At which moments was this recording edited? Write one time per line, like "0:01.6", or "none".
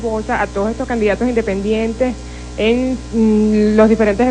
0:03.1